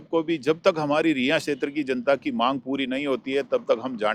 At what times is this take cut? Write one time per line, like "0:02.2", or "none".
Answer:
none